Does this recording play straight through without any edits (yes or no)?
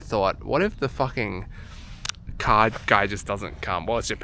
yes